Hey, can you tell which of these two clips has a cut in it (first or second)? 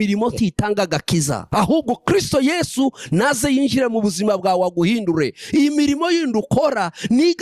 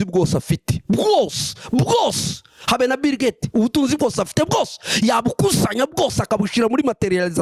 first